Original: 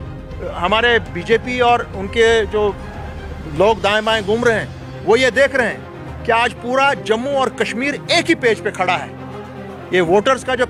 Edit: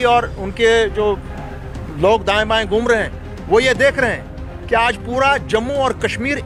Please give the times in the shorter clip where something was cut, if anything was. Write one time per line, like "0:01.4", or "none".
none